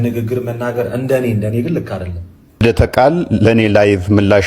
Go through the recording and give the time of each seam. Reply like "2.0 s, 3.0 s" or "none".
2.6 s

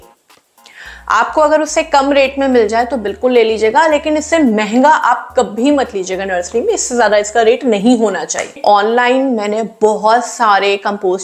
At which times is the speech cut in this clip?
none

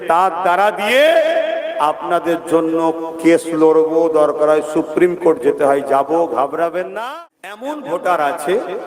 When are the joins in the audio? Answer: 6.9 s

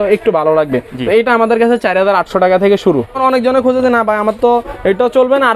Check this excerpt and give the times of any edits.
3.2 s

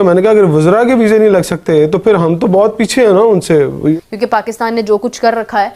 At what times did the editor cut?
3.9 s

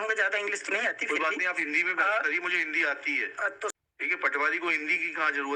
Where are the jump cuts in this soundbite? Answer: 3.7 s

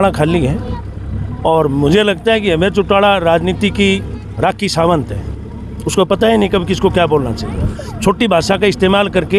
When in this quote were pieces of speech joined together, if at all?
none

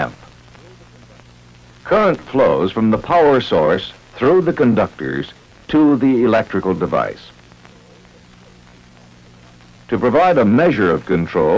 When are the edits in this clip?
2.8 s

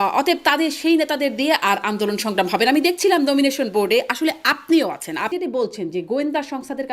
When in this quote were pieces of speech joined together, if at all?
5.3 s

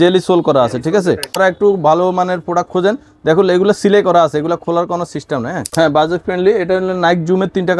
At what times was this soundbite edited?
1.4 s, 5.6 s

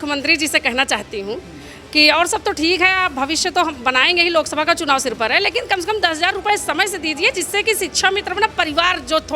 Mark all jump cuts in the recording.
none

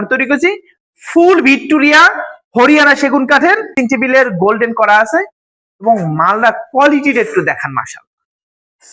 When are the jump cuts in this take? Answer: 3.7 s

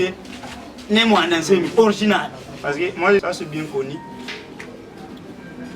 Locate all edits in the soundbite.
3.2 s

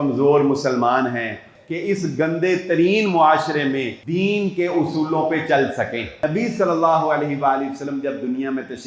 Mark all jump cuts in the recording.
1.5 s, 4.0 s, 6.2 s

